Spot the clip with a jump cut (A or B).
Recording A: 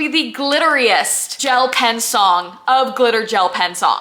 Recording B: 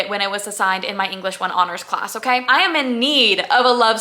B